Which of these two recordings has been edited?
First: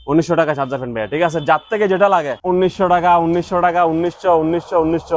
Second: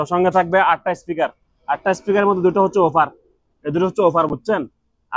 first; 1 cut; at 2.3 s

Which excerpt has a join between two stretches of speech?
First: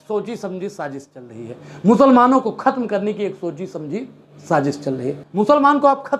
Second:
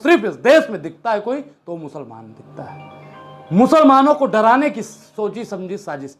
first; 1 cut; at 5.2 s

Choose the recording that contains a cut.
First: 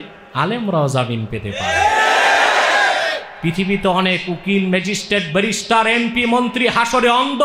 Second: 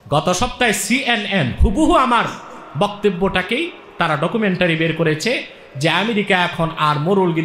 first; 1 cut; at 3.3 s

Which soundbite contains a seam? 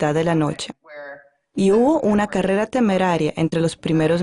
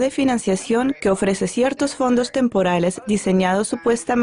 second; 1 cut; at 0.9 s

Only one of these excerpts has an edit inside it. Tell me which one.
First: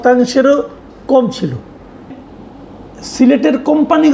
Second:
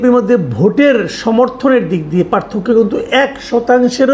first; 1 cut; at 2.1 s

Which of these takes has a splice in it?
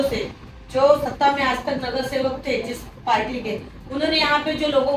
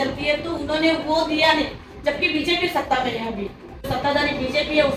second; 1 cut; at 3.9 s

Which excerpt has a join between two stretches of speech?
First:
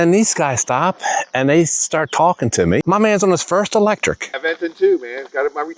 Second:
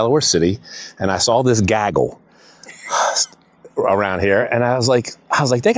first; 2 cuts; at 2.8 s, 4.3 s

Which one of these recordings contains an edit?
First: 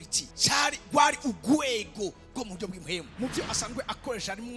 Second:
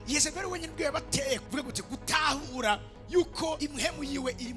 first; 1 cut; at 3.1 s

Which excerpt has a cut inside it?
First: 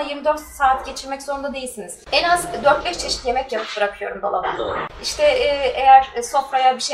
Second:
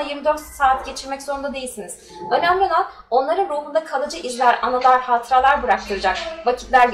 first; 2 cuts; at 2.0 s, 5.0 s

